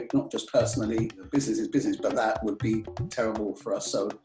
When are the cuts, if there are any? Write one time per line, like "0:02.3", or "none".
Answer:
0:01.3